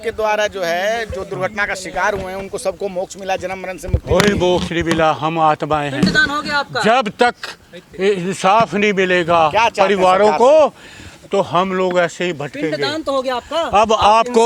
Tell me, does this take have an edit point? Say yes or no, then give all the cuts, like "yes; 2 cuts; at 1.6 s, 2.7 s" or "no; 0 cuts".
no; 0 cuts